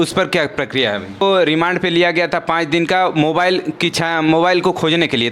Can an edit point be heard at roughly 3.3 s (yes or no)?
no